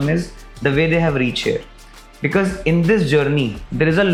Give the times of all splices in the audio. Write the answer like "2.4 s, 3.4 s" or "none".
none